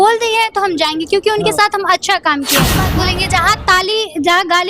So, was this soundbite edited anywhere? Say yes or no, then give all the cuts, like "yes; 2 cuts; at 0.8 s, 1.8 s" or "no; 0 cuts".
yes; 1 cut; at 2.9 s